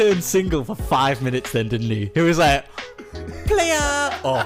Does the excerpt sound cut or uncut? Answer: uncut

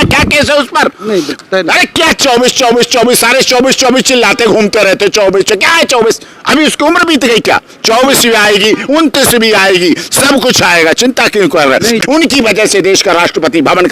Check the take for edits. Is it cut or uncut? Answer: cut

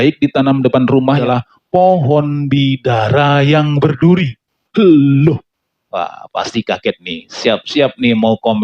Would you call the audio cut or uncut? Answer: cut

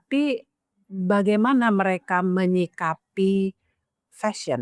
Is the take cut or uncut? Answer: uncut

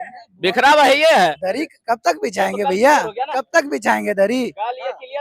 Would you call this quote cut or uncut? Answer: cut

